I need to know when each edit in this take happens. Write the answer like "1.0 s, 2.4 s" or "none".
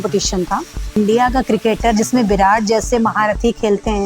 1.0 s